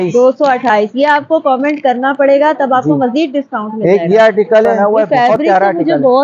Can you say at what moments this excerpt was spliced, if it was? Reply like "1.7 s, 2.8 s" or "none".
4.7 s